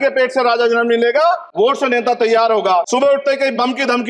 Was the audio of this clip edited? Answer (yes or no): yes